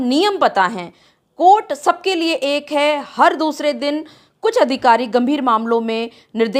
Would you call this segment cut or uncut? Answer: uncut